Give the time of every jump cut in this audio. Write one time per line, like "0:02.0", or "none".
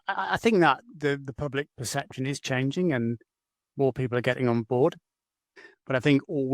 0:05.6